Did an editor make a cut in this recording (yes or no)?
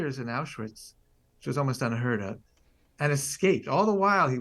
no